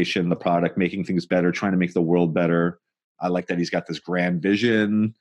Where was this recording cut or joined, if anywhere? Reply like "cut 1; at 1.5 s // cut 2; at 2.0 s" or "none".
cut 1; at 3.4 s